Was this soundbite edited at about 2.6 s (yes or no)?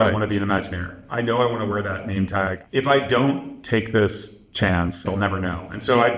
yes